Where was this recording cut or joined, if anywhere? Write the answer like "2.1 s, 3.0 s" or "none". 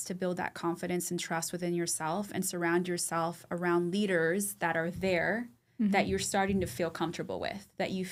none